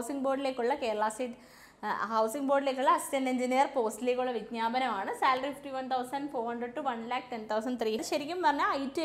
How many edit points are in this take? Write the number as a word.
one